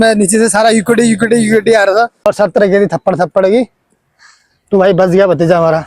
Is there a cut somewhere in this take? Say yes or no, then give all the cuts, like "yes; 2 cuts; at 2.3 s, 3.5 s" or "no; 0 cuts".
yes; 1 cut; at 2.3 s